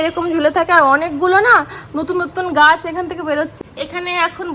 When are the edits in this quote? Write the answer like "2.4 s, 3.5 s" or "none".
3.6 s